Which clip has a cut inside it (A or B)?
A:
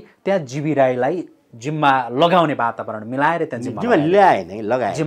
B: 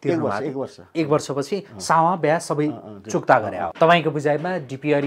B